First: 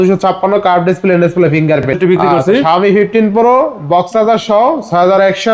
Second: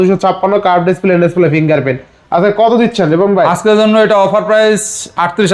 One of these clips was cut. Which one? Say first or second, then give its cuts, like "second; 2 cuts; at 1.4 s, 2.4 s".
first; 1 cut; at 1.9 s